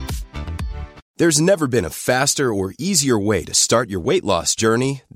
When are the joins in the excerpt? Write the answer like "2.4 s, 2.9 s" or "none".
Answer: 0.9 s